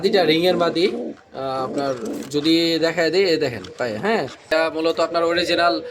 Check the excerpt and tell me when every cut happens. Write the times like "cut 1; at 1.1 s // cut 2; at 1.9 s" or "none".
cut 1; at 4.5 s